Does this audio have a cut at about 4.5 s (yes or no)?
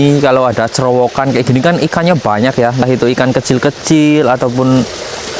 no